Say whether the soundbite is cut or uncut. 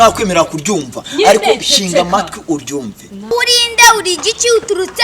cut